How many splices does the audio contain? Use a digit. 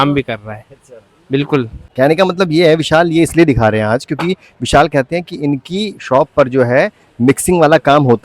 1